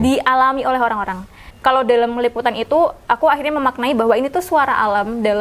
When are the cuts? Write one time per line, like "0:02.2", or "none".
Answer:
0:01.5

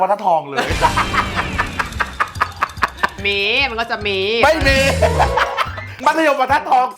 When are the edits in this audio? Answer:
none

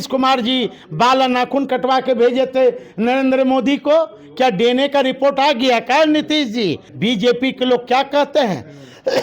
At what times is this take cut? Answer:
0:06.9

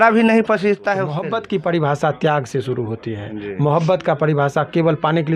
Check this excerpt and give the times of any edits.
0:01.2

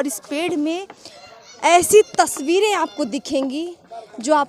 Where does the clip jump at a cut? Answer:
none

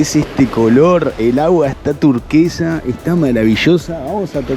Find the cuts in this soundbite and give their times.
none

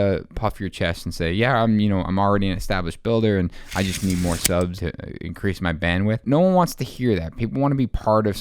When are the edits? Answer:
0:04.8
0:06.2

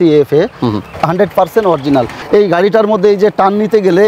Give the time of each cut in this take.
0:00.9
0:02.2

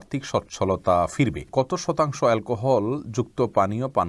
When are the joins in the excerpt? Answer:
0:01.4

